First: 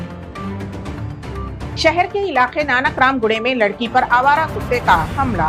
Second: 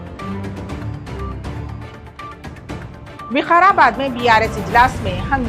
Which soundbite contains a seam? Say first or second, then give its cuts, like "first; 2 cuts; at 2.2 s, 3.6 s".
second; 1 cut; at 1.2 s